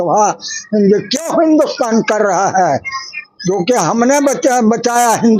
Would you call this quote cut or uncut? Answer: uncut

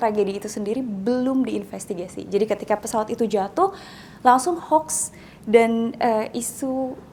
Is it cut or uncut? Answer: uncut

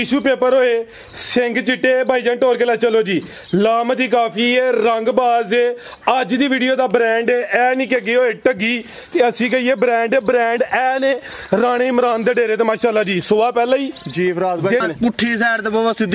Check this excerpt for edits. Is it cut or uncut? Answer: cut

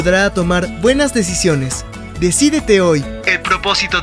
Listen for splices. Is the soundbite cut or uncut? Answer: cut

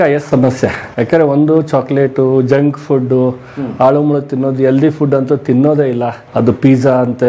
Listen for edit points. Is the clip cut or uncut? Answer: uncut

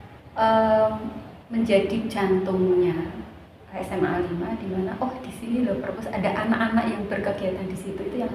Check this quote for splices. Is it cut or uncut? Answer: uncut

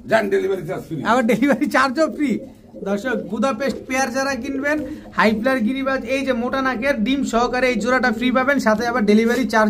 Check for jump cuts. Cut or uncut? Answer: uncut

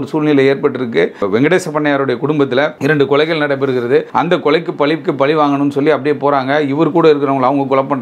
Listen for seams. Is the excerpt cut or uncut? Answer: cut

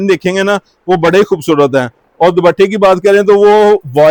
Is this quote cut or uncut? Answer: uncut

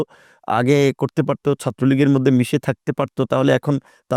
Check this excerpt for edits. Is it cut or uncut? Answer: uncut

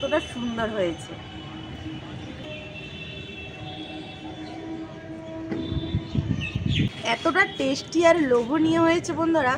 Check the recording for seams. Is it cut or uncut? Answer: uncut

